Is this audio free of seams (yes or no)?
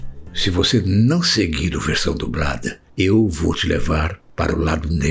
yes